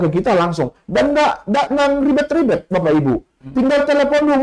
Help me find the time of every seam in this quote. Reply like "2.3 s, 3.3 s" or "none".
none